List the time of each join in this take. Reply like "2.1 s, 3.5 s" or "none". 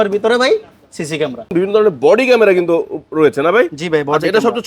1.5 s